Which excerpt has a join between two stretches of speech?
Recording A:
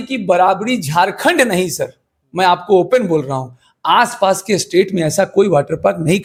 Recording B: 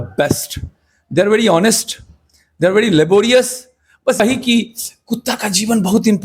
B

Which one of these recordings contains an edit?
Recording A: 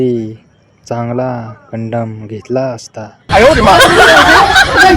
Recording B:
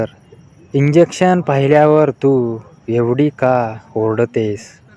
A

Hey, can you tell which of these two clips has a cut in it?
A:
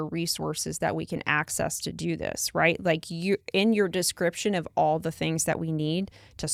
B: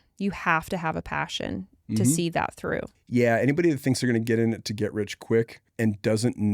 B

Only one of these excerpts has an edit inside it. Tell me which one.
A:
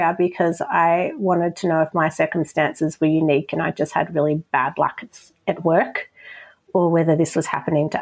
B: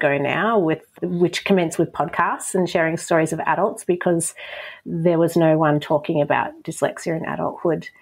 B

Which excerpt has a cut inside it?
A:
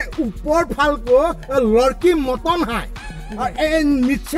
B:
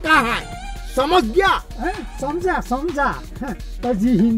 B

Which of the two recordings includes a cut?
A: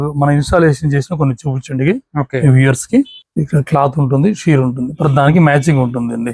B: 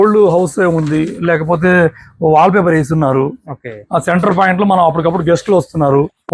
A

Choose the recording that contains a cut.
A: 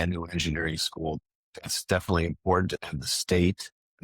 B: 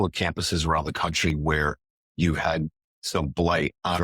A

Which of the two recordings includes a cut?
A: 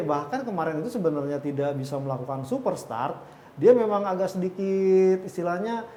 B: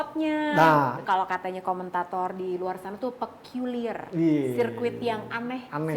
B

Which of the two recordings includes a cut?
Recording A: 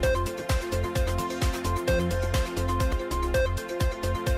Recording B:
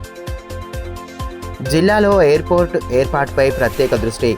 B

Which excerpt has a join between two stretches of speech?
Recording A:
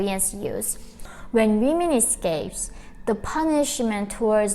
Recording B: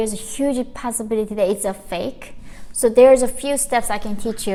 A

